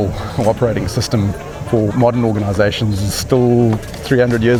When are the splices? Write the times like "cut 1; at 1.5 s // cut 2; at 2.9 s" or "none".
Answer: none

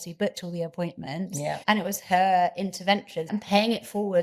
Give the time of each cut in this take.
cut 1; at 1.6 s // cut 2; at 3.3 s

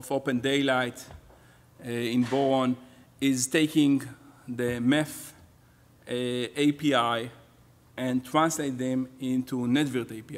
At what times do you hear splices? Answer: cut 1; at 7.8 s

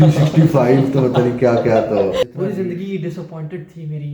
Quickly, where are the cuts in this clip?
cut 1; at 2.2 s

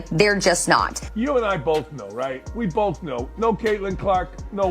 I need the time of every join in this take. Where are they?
cut 1; at 1.0 s

